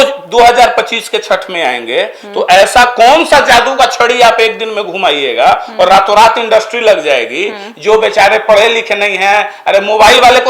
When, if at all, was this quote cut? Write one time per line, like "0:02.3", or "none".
none

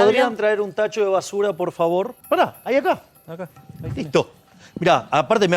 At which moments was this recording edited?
0:02.2

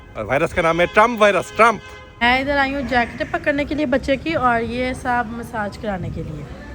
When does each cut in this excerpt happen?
0:02.1

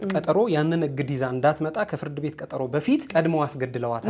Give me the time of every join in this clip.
0:03.1

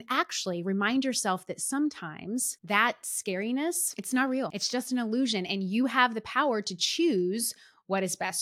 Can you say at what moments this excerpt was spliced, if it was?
0:03.9
0:04.6

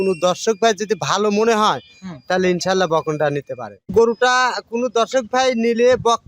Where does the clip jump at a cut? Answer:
0:03.9

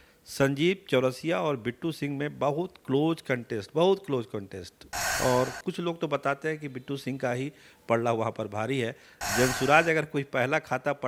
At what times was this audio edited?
none

